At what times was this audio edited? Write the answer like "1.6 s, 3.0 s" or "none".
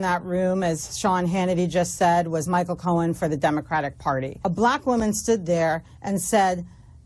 4.3 s